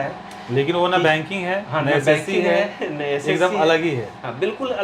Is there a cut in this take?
no; 0 cuts

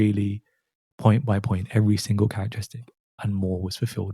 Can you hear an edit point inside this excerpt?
yes; 1 cut; at 3.2 s

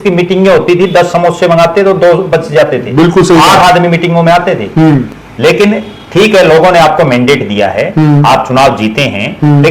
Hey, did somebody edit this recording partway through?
no; 0 cuts

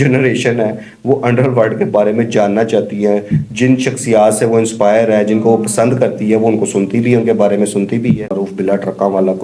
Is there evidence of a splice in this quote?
yes; 1 cut; at 8.3 s

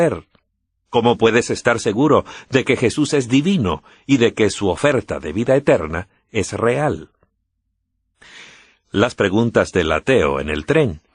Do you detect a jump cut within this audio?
no; 0 cuts

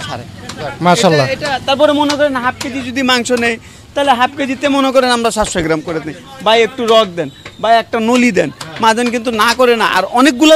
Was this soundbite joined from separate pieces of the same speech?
no; 0 cuts

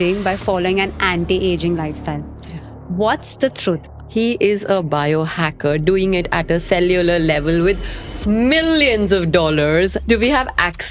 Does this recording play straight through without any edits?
no; 2 cuts; at 3.9 s, 10.0 s

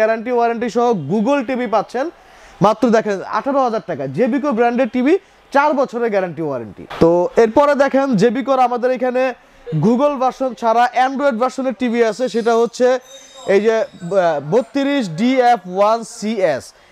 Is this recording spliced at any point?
no; 0 cuts

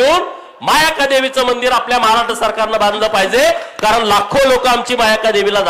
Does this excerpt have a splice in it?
no; 0 cuts

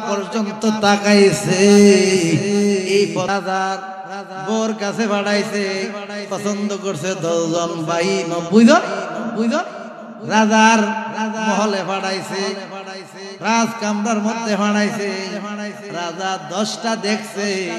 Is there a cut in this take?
yes; 1 cut; at 3.3 s

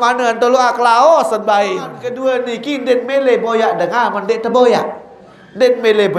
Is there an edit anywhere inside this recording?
yes; 1 cut; at 2.1 s

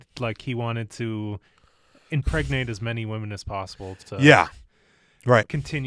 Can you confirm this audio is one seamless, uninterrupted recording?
yes; 0 cuts

